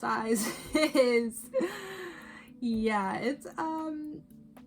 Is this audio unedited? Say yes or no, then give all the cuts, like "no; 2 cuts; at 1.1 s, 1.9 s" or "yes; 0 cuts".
no; 1 cut; at 3.5 s